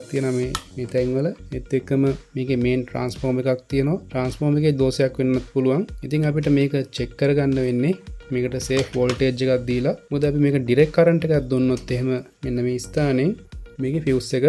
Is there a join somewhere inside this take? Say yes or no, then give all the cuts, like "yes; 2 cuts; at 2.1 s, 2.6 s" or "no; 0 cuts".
no; 0 cuts